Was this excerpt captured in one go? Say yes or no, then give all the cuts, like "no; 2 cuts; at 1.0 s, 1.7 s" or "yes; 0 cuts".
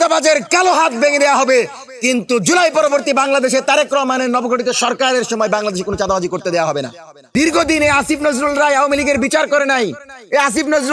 no; 1 cut; at 7.3 s